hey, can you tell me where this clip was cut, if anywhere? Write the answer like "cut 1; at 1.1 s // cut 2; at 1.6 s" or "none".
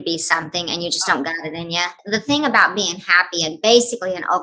cut 1; at 2.0 s

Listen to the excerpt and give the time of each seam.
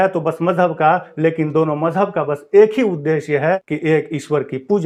none

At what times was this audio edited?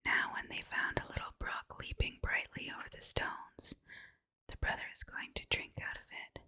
none

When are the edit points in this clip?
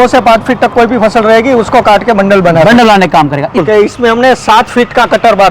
cut 1; at 3.6 s

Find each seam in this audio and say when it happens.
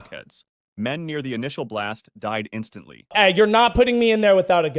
cut 1; at 3.0 s

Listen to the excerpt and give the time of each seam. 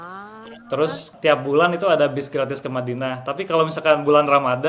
cut 1; at 1.1 s

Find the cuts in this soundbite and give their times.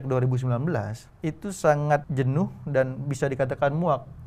cut 1; at 1.0 s // cut 2; at 2.1 s

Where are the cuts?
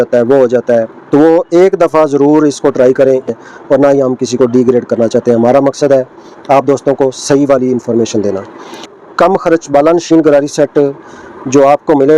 cut 1; at 3.3 s // cut 2; at 8.9 s

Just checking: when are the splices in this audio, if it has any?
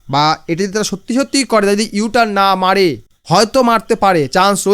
cut 1; at 3.1 s

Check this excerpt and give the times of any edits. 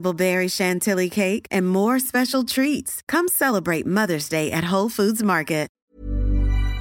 cut 1; at 5.8 s

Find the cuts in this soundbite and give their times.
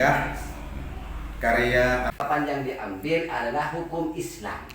cut 1; at 2.2 s

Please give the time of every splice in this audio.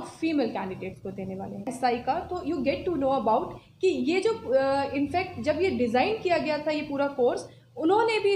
cut 1; at 1.7 s

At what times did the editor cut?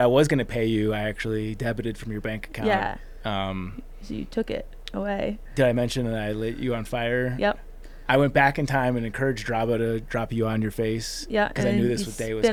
none

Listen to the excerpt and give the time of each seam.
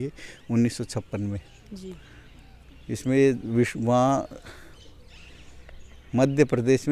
none

